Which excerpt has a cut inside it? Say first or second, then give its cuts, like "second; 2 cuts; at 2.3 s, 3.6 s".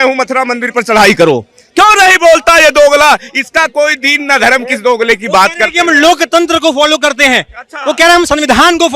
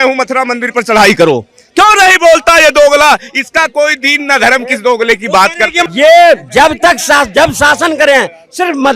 second; 1 cut; at 5.8 s